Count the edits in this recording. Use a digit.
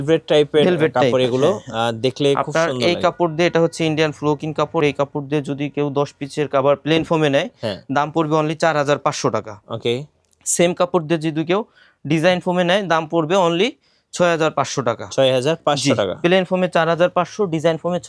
0